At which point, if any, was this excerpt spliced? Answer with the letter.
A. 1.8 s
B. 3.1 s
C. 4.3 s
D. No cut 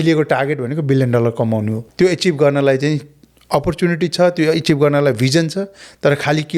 A